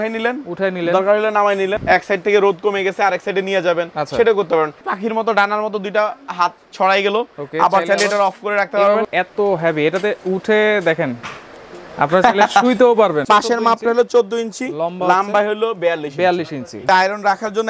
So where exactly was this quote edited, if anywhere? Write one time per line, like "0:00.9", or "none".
0:01.8
0:04.9
0:09.0
0:13.2
0:16.8